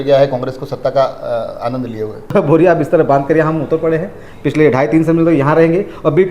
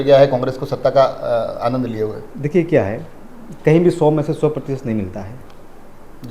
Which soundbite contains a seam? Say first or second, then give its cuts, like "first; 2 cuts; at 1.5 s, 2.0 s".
first; 1 cut; at 2.3 s